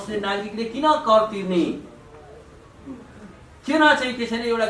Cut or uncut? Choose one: uncut